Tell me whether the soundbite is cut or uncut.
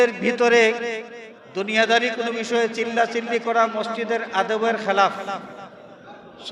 cut